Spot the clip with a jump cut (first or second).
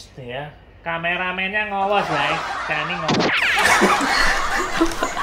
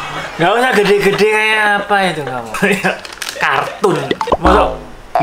first